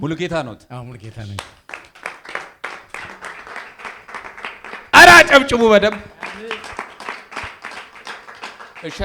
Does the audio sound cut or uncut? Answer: uncut